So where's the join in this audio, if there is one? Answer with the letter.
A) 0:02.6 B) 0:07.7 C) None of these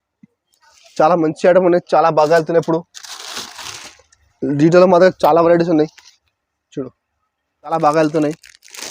B